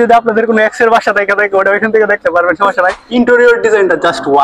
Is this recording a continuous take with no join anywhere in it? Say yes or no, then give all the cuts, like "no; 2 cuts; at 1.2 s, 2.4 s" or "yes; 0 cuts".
no; 1 cut; at 3.0 s